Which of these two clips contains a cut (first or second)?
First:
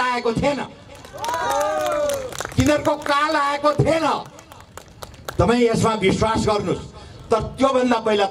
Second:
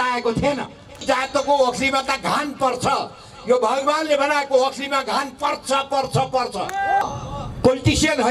second